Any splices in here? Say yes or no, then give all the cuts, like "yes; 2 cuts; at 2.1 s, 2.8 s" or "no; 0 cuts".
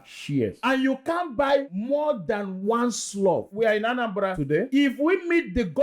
yes; 2 cuts; at 3.5 s, 4.6 s